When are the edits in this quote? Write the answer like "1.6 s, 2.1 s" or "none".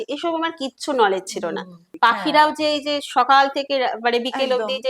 1.9 s